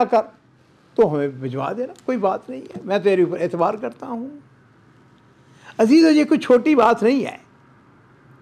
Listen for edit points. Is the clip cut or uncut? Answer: uncut